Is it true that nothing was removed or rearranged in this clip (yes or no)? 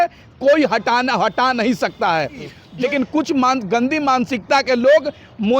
no